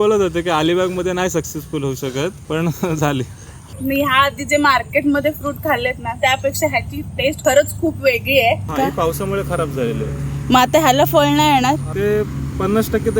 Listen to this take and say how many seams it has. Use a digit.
2